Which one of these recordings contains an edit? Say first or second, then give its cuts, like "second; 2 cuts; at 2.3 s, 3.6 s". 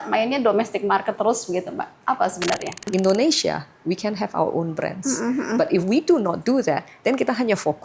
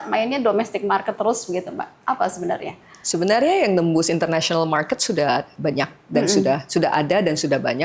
first; 1 cut; at 2.8 s